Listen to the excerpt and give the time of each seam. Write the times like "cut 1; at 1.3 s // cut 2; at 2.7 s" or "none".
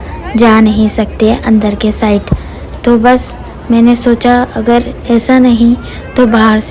none